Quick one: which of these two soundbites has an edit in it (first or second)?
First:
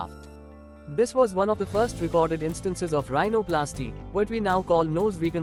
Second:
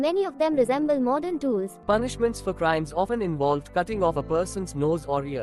second